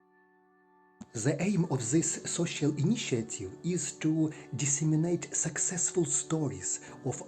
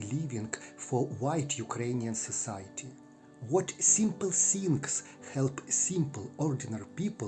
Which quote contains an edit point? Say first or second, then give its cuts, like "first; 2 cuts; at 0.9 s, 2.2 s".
first; 1 cut; at 1.0 s